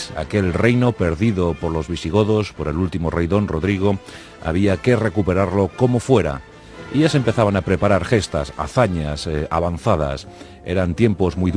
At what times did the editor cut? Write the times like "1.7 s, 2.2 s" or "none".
8.5 s